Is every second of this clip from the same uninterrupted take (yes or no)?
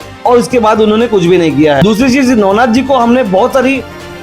yes